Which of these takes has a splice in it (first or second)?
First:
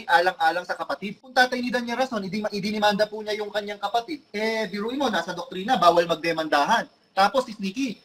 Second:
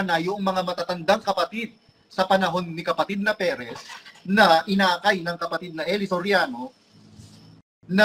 first